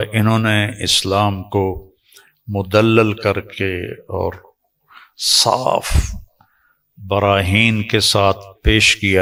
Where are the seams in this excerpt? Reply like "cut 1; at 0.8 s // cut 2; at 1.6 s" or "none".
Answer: none